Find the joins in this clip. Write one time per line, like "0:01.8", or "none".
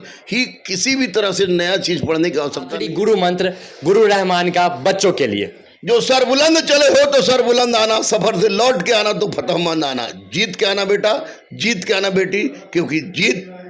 0:02.7